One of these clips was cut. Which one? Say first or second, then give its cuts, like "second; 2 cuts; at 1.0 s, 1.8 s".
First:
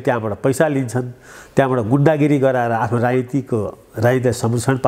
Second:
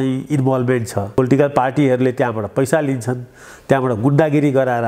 second; 1 cut; at 1.2 s